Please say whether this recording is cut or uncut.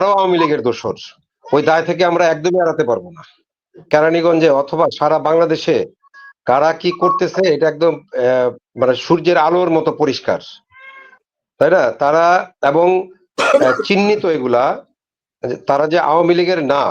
cut